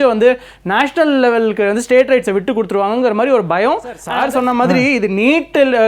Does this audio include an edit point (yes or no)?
yes